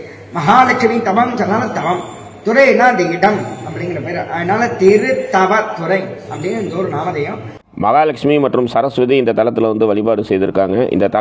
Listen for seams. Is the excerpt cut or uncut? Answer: cut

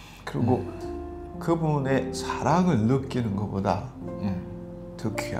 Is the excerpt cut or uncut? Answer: uncut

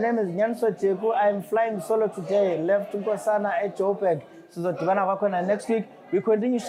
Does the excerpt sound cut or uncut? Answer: uncut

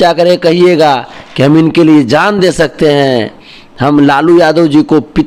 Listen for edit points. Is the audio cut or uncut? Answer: uncut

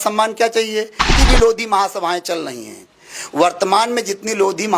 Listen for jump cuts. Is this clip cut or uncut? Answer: cut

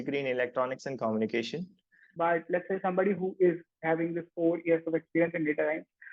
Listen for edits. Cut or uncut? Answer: cut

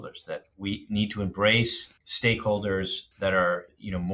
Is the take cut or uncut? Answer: cut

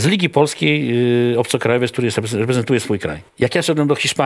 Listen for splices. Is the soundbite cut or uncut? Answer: cut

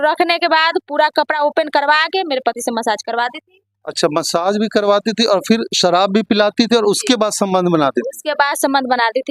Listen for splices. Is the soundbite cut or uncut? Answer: uncut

